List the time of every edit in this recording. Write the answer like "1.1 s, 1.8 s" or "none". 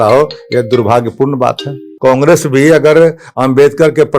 1.8 s